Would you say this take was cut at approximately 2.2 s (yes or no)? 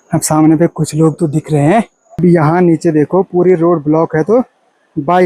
yes